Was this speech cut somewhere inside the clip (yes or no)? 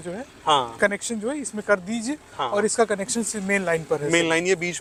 no